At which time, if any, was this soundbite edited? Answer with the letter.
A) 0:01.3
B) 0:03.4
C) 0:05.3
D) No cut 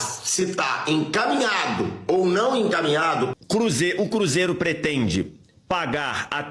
B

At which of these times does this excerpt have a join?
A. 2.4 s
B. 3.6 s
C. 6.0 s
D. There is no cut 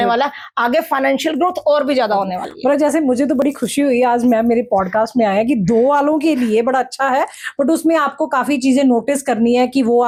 D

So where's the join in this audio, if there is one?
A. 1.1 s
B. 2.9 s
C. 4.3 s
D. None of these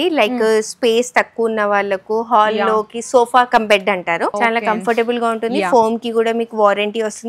C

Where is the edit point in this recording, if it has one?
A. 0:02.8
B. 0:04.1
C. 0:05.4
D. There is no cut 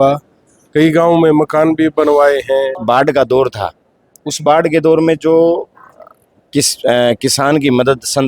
A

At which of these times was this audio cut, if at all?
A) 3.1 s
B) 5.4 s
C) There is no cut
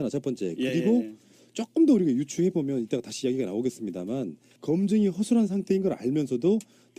B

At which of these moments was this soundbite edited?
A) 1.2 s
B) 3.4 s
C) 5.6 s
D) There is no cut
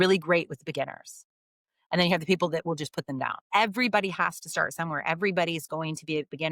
B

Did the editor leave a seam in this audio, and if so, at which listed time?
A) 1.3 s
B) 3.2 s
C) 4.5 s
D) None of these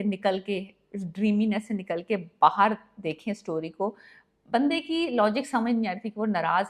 D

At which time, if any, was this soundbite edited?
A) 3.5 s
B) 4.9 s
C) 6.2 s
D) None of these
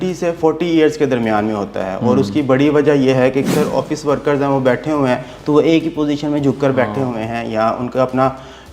A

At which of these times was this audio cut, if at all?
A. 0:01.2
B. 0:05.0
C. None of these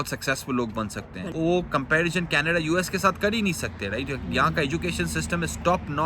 A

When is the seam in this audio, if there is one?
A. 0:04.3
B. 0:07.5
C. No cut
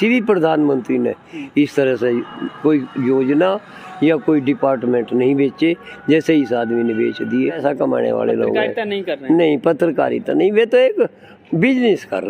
B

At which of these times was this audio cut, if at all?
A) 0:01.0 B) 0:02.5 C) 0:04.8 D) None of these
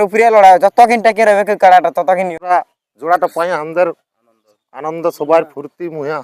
B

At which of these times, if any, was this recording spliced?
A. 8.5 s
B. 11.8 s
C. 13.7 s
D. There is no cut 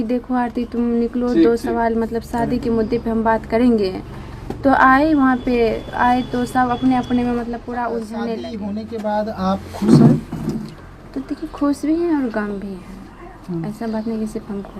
A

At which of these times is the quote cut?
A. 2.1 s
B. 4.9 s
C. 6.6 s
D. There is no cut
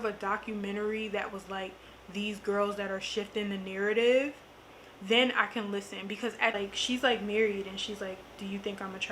C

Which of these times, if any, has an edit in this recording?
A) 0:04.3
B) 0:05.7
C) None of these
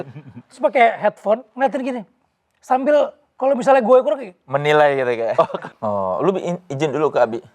B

